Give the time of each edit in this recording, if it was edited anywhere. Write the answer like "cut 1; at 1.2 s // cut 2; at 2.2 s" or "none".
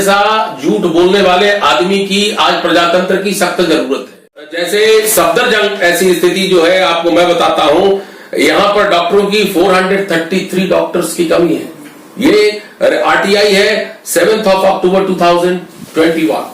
cut 1; at 4.6 s